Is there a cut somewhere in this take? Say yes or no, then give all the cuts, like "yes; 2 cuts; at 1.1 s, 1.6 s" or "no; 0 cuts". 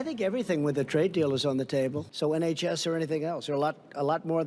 yes; 1 cut; at 2.0 s